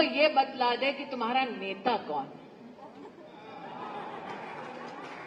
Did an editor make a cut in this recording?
no; 0 cuts

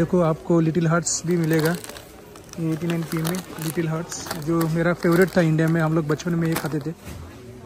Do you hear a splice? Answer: no; 0 cuts

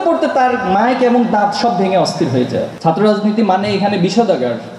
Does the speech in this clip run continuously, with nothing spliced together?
no; 1 cut; at 2.7 s

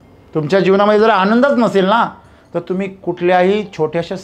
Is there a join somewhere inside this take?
no; 0 cuts

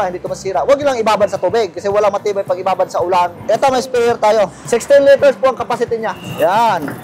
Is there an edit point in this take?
no; 0 cuts

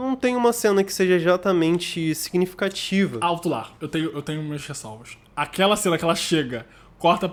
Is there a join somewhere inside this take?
no; 0 cuts

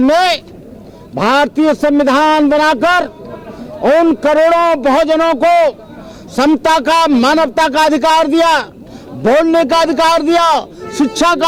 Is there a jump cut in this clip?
no; 0 cuts

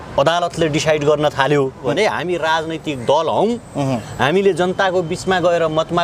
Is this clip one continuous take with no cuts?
no; 1 cut; at 1.9 s

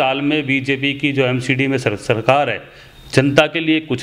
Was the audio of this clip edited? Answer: no; 0 cuts

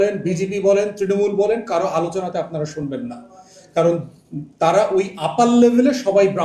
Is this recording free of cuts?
yes; 0 cuts

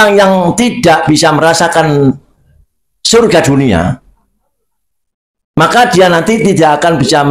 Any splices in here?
no; 0 cuts

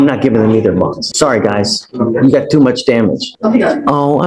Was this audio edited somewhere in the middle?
yes; 2 cuts; at 1.1 s, 3.3 s

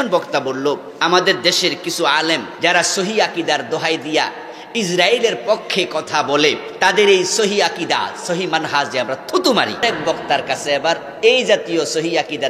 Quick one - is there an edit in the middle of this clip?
yes; 4 cuts; at 0.9 s, 2.5 s, 6.7 s, 9.8 s

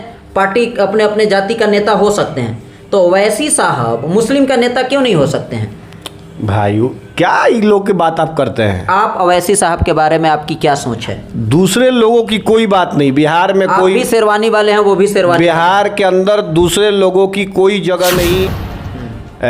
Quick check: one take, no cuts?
no; 1 cut; at 18.5 s

